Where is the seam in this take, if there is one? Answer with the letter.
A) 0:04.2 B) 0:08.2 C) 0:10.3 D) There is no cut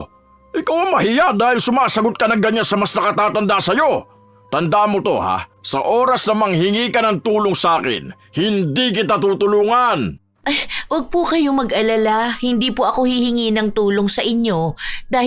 C